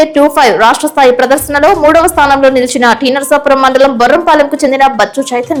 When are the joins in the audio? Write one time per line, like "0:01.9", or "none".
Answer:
none